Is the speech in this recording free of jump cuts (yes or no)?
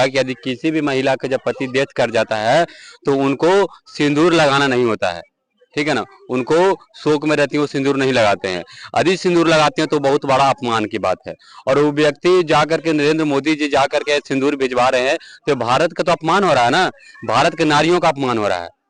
yes